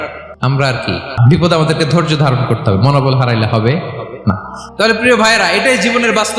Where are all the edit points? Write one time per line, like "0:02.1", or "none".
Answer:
0:01.1
0:04.5